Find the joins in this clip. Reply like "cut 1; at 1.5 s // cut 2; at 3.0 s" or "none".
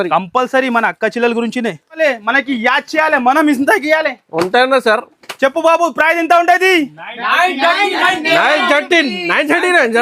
cut 1; at 2.0 s